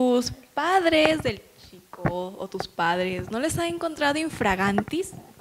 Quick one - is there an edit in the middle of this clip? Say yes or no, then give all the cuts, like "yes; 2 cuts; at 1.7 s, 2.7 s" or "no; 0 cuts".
no; 0 cuts